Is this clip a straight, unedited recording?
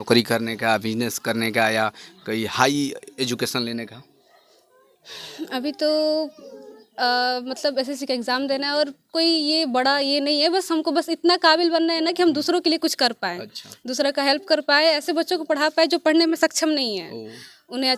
yes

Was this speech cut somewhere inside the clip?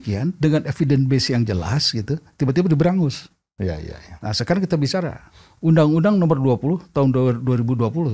no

